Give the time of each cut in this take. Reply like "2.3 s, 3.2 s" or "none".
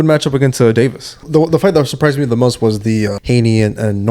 1.2 s, 3.2 s